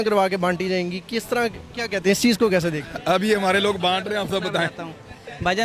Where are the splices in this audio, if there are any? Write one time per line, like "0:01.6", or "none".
none